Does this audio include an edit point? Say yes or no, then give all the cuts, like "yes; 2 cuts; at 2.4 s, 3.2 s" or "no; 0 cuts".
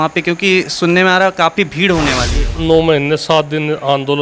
yes; 1 cut; at 2.5 s